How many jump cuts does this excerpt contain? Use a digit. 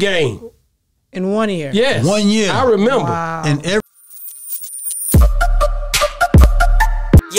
1